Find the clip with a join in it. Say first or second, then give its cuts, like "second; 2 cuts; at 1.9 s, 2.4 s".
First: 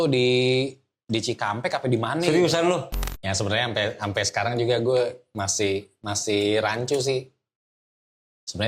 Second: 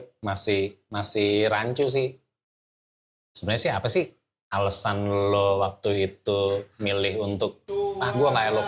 first; 1 cut; at 3.0 s